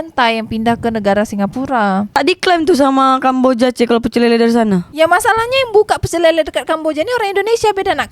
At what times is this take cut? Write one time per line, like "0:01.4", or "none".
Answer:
0:02.1